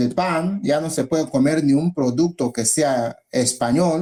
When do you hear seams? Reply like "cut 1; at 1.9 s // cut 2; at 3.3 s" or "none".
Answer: none